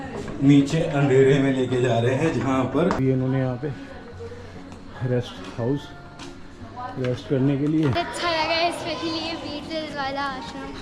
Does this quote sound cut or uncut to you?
cut